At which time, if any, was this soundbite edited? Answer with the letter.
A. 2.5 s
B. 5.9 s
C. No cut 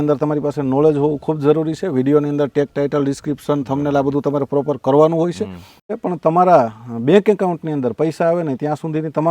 B